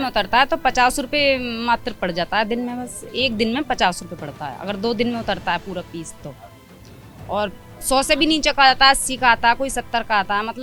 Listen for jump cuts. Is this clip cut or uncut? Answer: uncut